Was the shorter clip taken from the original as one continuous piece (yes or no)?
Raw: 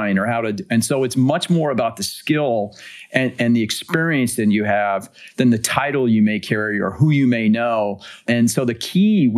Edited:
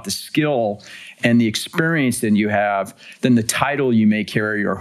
no